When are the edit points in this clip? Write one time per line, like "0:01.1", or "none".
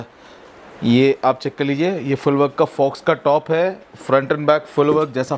none

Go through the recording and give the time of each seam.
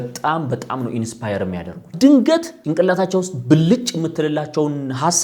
0:01.9
0:02.6

